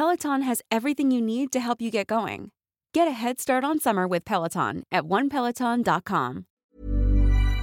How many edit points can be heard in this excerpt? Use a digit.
0